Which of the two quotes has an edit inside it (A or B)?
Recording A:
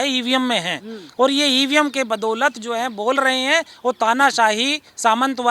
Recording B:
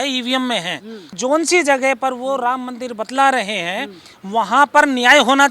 B